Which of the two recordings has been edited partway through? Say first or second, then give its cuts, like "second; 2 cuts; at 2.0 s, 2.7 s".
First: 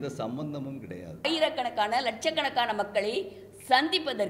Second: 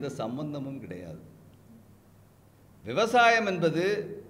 first; 1 cut; at 1.3 s